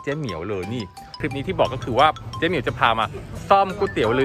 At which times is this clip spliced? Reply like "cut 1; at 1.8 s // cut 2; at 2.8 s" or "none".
cut 1; at 1.2 s